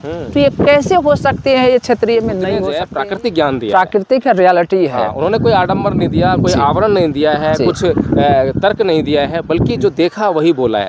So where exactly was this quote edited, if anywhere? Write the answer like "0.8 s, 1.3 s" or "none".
2.8 s